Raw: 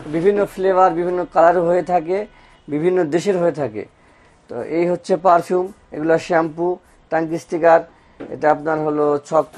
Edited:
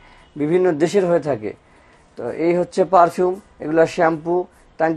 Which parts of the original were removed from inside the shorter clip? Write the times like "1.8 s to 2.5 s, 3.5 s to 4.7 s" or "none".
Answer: none